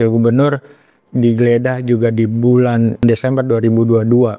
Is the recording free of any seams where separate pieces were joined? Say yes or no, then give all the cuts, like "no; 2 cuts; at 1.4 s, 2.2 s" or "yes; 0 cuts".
no; 1 cut; at 3.0 s